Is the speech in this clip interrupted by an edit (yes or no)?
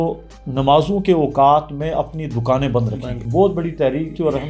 yes